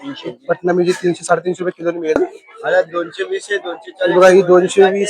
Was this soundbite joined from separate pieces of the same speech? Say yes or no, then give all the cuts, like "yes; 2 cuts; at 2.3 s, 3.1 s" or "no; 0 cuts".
yes; 1 cut; at 2.2 s